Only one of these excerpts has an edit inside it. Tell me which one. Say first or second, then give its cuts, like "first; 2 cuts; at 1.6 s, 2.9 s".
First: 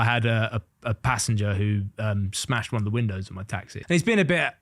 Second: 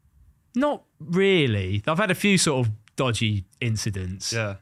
first; 1 cut; at 3.7 s